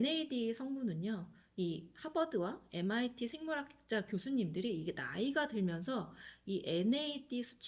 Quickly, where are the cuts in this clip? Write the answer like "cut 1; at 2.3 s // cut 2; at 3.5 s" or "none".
none